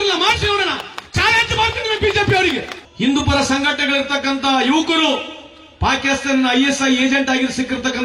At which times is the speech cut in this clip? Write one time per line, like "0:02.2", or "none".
0:02.8